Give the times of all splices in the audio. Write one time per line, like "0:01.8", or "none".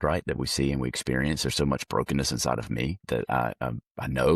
0:03.0